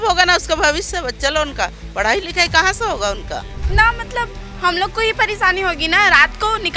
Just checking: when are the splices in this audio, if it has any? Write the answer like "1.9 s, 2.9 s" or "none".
3.6 s